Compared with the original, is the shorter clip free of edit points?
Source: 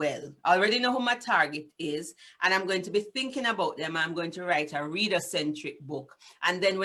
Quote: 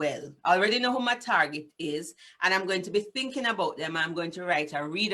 yes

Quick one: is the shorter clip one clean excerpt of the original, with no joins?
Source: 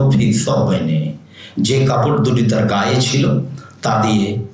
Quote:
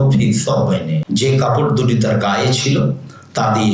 no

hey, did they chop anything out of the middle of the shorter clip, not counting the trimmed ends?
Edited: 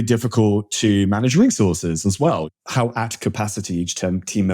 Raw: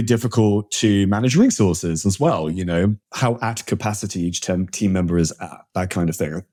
yes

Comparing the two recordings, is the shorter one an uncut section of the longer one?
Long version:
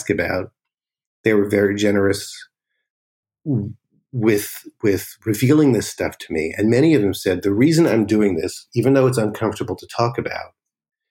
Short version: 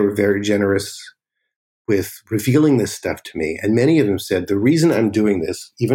no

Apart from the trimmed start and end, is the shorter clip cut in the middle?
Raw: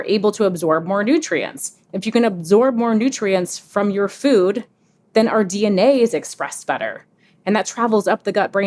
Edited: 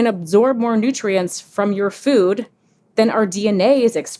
no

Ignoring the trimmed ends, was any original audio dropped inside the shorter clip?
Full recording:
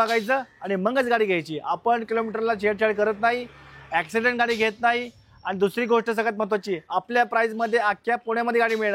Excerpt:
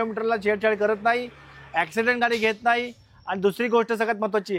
no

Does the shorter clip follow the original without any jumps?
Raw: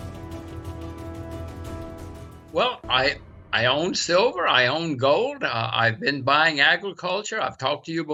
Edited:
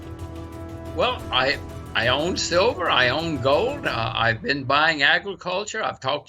no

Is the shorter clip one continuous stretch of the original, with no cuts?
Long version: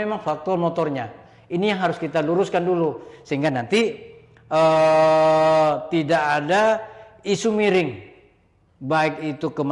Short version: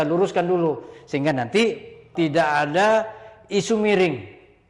no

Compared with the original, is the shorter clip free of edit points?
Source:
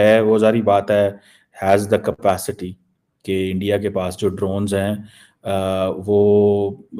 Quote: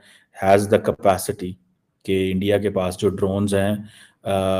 yes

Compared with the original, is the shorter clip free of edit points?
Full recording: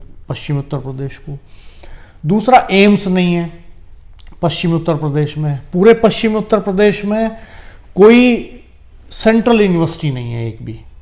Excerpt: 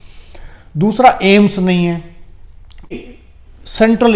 no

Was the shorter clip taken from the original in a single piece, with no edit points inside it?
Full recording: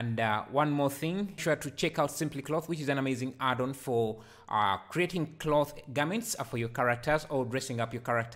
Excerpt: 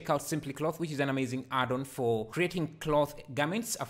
no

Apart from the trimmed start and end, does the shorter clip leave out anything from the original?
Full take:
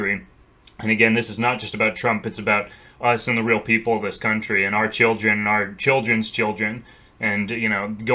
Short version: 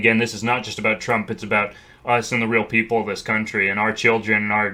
no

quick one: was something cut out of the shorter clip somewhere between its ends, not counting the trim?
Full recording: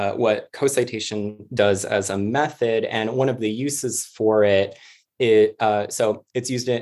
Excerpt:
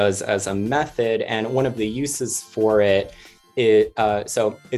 no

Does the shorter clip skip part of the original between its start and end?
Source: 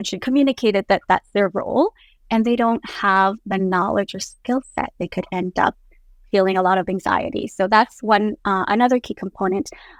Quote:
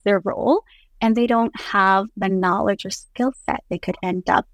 no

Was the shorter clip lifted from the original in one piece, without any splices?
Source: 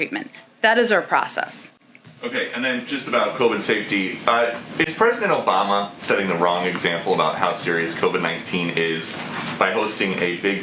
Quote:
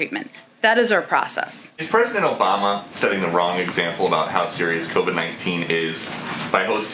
no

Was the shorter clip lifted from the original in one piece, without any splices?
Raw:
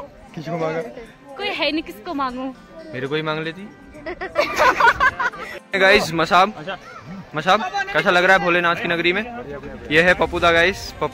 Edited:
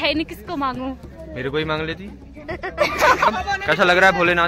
no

